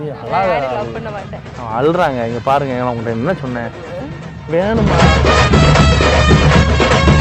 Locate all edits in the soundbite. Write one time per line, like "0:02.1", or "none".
0:04.9

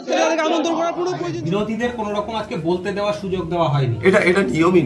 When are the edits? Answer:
0:01.2

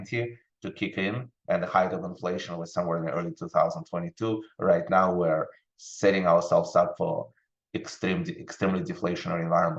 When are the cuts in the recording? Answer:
none

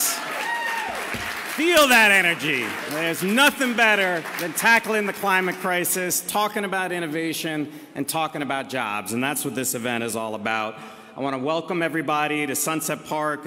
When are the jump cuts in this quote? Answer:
0:01.3
0:06.4
0:11.4

